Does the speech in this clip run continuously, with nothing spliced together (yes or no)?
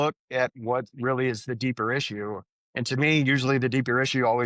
yes